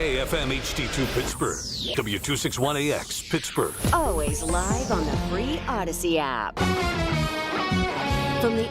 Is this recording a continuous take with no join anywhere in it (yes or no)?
no